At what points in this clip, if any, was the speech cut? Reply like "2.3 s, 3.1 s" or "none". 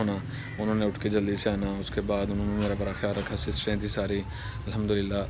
none